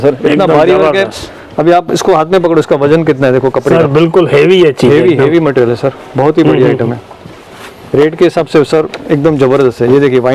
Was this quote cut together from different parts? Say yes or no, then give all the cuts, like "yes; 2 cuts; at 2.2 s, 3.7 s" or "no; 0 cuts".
no; 0 cuts